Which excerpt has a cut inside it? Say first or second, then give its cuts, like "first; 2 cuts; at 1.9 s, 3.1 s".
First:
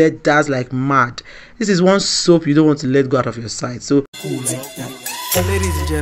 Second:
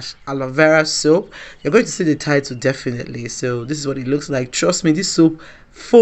first; 1 cut; at 4.2 s